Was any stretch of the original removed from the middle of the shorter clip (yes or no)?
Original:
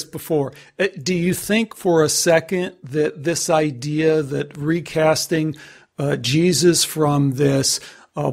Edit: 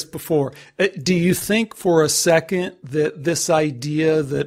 no